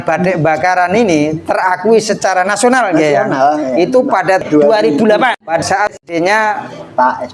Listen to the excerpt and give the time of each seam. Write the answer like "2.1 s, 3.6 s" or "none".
4.4 s, 5.6 s